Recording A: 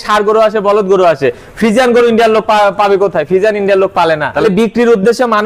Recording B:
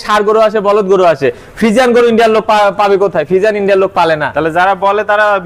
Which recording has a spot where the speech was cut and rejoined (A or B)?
A